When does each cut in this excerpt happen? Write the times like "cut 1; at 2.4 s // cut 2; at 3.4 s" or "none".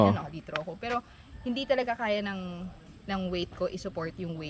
none